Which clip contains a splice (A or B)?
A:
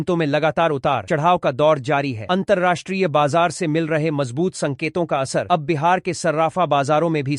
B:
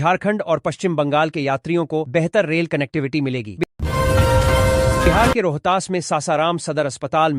B